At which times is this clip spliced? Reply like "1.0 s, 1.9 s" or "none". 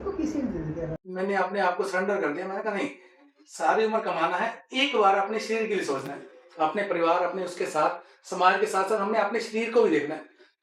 1.0 s